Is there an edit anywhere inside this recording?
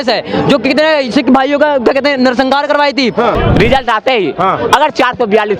yes; 1 cut; at 3.4 s

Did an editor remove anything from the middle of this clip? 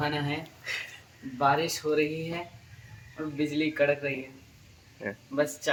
no; 0 cuts

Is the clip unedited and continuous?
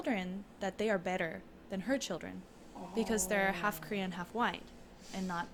yes; 0 cuts

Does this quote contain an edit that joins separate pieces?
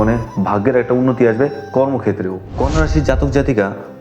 yes; 1 cut; at 2.4 s

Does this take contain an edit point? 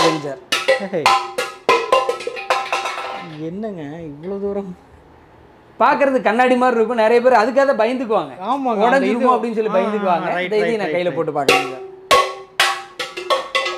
no; 0 cuts

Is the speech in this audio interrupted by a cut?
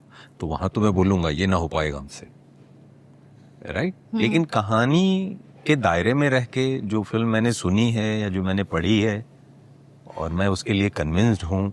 no; 0 cuts

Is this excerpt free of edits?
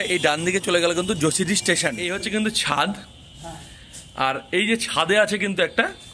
no; 1 cut; at 2.0 s

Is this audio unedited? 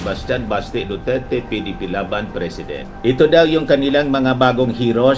no; 1 cut; at 2.8 s

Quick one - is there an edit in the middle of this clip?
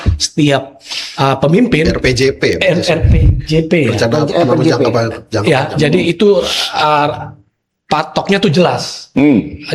no; 0 cuts

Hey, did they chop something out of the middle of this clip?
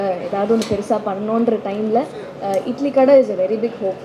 no; 0 cuts

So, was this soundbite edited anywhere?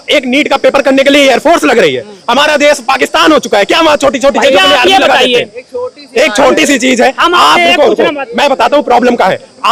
no; 0 cuts

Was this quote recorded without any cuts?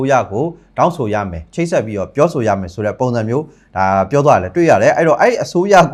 yes; 0 cuts

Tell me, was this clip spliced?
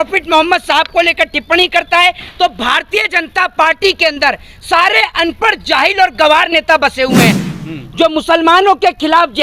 yes; 1 cut; at 7.4 s

